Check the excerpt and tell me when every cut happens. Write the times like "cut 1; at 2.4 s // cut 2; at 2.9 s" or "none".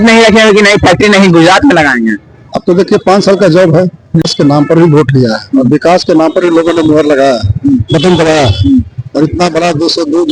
cut 1; at 4.2 s